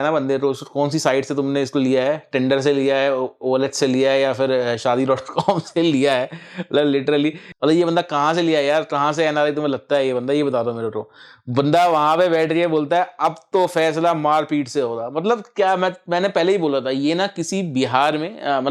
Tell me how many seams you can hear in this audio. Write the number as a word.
zero